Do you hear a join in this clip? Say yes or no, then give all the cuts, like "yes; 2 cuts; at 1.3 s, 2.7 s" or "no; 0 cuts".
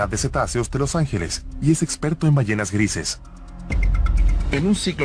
no; 0 cuts